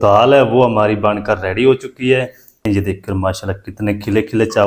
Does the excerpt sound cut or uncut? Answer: cut